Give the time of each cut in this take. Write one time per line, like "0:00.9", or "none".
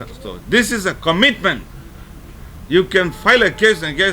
none